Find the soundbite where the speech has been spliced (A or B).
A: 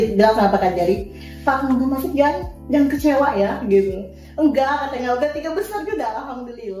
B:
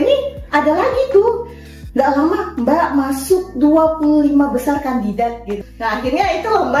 B